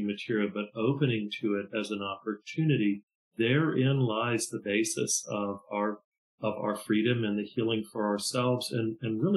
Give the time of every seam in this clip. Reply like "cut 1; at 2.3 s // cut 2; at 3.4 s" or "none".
none